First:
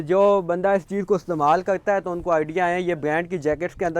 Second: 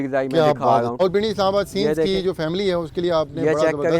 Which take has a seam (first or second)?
second